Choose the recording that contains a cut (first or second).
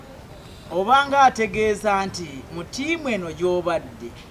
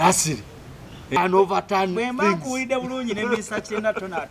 second